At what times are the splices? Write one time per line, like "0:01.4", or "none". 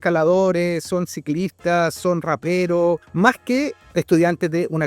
0:03.1